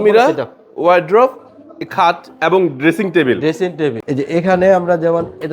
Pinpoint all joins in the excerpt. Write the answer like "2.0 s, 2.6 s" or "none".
4.0 s